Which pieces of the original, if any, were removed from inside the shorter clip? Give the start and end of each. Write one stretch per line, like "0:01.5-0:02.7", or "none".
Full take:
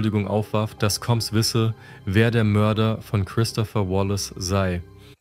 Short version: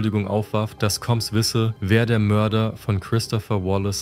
0:01.8-0:02.0